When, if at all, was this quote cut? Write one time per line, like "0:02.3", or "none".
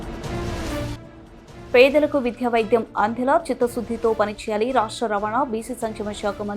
0:00.9

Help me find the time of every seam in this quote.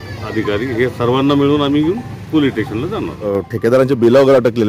0:03.4

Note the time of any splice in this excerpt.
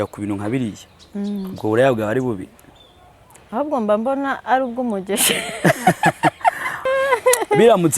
0:06.8

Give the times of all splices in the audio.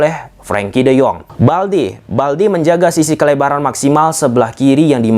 0:01.3

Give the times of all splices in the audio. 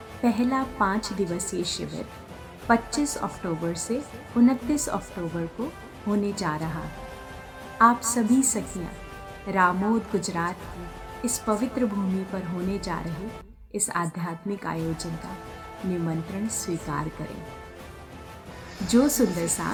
none

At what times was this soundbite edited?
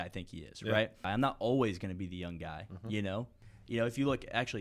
0:01.1
0:03.4

